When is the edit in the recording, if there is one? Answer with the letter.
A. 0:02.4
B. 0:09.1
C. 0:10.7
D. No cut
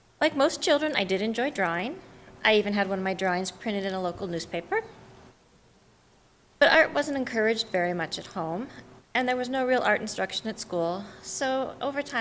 B